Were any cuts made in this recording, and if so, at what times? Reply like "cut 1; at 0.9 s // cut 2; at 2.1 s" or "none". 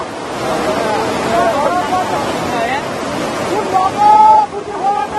cut 1; at 4.2 s